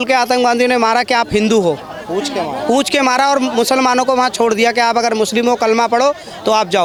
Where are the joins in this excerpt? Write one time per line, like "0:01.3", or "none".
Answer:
none